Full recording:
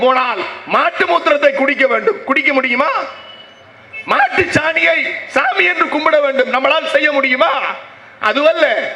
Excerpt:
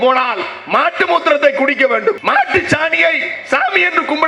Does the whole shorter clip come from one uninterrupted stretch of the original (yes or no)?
no